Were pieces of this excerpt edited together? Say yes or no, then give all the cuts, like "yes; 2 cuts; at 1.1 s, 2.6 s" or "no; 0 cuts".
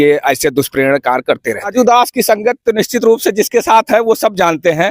yes; 1 cut; at 1.7 s